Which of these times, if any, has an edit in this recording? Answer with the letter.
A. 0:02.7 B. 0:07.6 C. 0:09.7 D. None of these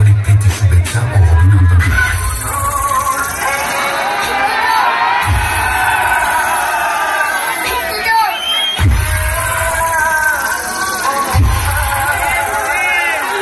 D